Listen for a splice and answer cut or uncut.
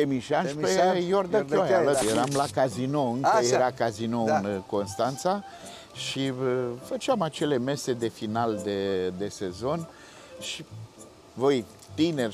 cut